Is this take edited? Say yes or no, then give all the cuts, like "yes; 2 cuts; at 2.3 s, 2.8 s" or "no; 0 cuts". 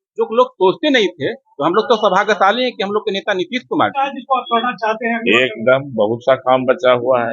yes; 1 cut; at 4.1 s